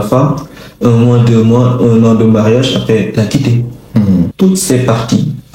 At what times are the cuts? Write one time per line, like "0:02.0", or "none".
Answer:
0:04.3